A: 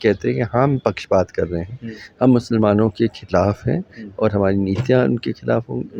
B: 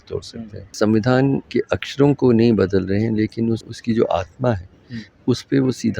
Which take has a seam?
B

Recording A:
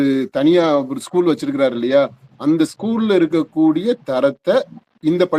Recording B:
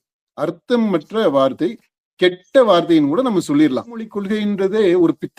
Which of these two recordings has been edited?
B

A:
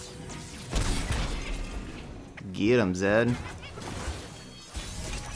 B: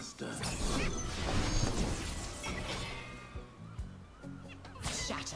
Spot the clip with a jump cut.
A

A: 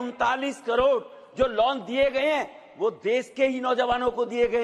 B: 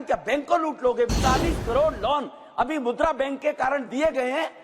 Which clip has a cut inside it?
B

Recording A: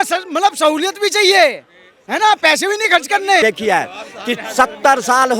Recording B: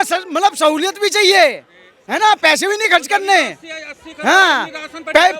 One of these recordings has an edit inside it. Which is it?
A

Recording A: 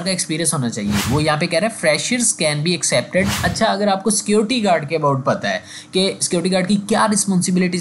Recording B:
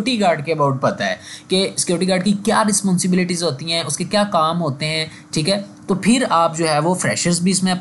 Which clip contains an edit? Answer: A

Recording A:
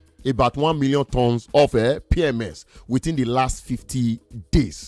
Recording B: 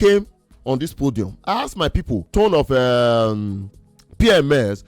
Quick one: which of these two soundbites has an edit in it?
B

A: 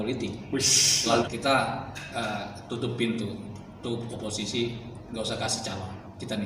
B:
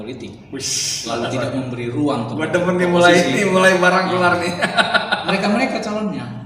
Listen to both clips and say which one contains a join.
A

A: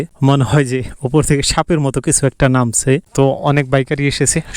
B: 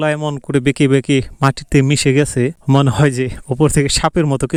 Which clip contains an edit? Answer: A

